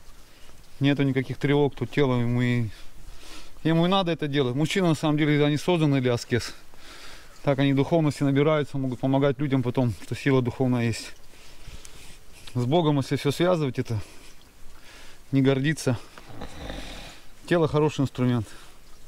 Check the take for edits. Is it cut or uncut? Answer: uncut